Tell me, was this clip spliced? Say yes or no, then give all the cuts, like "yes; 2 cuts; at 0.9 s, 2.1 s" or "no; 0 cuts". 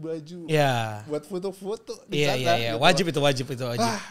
no; 0 cuts